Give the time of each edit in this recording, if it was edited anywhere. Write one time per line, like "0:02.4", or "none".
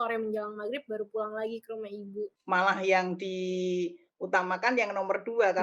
0:02.3